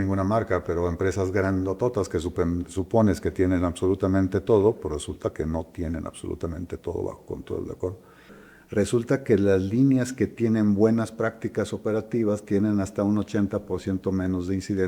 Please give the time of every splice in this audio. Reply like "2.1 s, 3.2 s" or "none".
8.4 s